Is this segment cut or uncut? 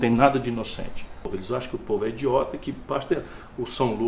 cut